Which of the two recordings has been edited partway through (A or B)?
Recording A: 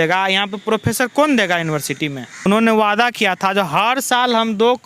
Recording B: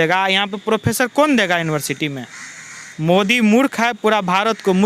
A